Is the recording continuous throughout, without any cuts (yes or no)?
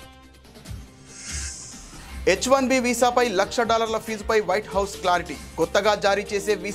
no